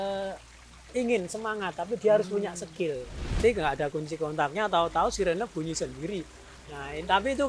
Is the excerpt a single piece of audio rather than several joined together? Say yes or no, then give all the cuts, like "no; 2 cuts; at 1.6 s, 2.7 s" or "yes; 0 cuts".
no; 1 cut; at 3.3 s